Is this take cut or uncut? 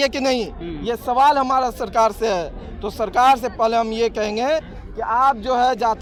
uncut